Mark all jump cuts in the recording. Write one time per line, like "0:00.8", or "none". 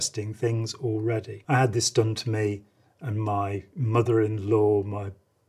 none